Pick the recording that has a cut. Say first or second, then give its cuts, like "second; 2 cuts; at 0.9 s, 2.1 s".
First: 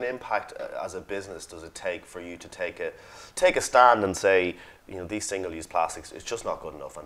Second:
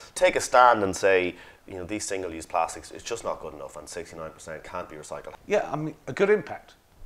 second; 1 cut; at 5.3 s